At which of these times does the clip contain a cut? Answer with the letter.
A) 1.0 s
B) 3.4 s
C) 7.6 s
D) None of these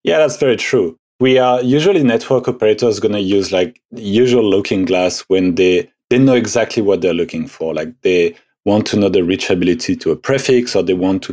A